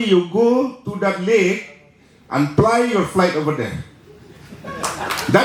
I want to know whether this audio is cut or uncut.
uncut